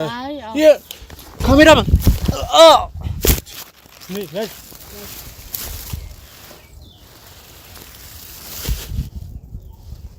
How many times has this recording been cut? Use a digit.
0